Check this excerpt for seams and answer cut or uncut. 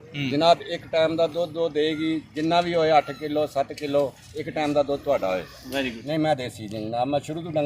cut